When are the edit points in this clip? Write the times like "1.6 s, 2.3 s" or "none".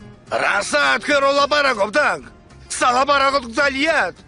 1.7 s